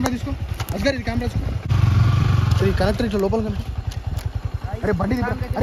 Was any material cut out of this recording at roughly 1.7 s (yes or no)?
yes